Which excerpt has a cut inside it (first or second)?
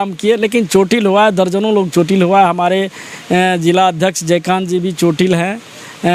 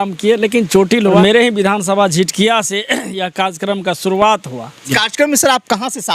second